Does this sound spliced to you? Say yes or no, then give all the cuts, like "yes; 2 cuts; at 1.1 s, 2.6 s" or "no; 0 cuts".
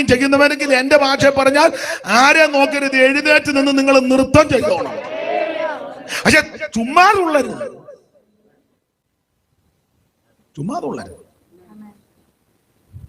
no; 0 cuts